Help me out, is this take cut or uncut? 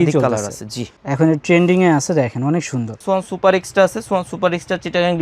cut